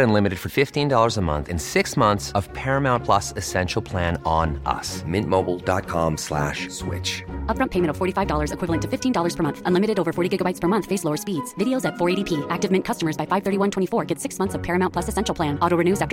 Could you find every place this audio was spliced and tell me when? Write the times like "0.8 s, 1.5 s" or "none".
none